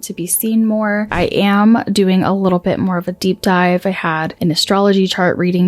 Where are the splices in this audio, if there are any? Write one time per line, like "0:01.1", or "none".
0:01.1
0:04.3

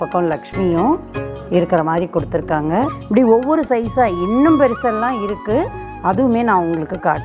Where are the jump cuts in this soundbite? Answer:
0:03.0

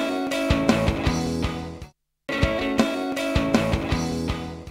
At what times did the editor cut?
0:02.3

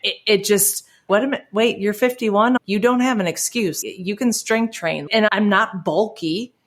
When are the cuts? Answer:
0:01.1
0:02.6
0:03.8
0:05.2

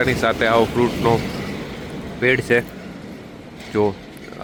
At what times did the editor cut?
none

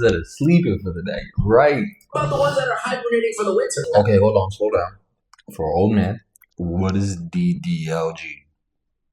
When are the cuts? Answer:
0:03.9

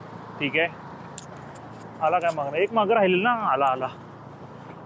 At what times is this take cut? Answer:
none

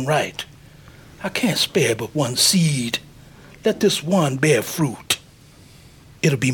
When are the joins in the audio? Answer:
none

